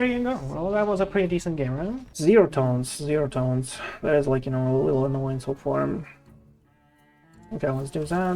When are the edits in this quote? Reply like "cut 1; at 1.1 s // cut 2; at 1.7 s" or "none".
cut 1; at 2.1 s